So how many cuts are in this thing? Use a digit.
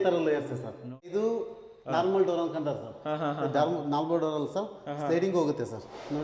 1